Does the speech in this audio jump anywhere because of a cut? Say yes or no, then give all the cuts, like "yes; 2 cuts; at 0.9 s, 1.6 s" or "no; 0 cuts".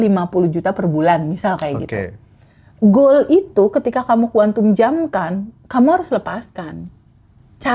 no; 0 cuts